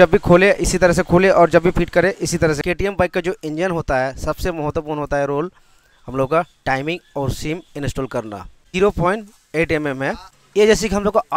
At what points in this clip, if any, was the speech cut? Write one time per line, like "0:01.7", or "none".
0:02.6
0:08.6
0:10.3